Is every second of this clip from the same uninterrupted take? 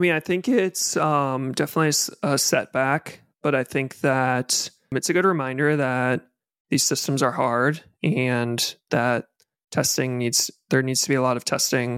no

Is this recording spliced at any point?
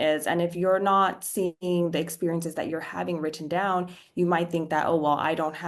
no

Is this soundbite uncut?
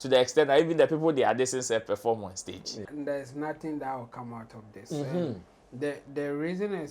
no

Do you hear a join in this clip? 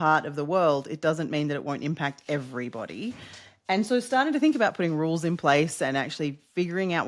no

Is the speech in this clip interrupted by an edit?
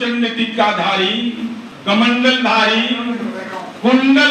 yes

